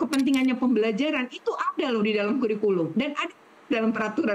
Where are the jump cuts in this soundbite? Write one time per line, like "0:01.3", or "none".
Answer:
none